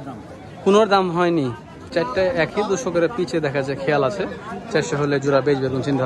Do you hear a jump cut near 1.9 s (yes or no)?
yes